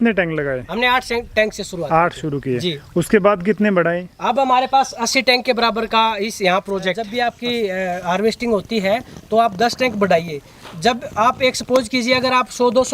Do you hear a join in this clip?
yes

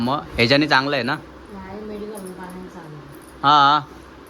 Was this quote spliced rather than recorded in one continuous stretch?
no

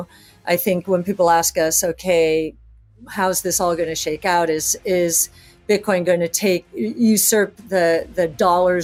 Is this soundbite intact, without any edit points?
yes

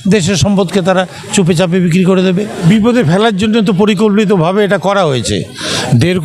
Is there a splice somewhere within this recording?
yes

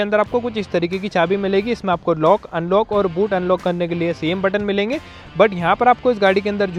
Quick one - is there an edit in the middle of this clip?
no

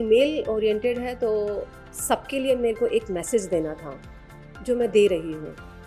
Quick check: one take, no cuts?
yes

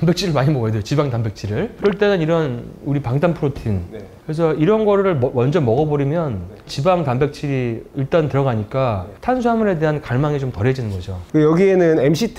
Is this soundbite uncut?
no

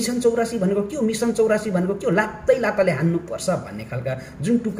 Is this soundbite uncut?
yes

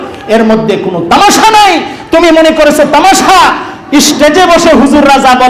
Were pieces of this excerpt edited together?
no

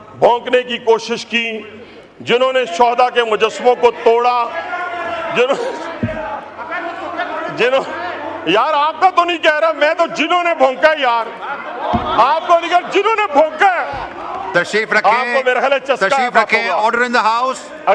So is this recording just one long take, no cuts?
no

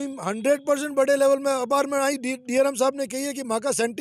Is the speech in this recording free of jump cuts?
yes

